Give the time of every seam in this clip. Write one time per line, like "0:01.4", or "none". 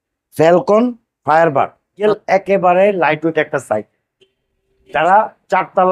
0:02.0